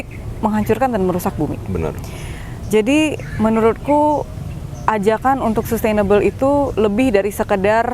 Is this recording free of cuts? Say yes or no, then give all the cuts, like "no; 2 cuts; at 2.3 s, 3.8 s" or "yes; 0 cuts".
yes; 0 cuts